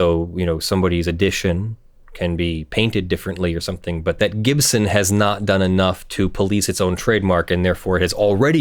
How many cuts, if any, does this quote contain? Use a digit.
1